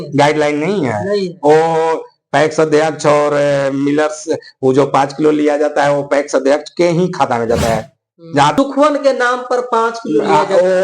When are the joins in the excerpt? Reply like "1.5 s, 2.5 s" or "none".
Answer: 8.5 s